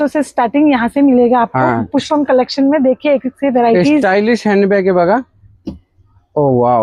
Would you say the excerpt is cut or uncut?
uncut